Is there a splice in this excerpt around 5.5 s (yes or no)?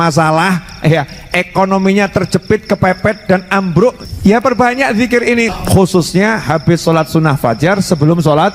yes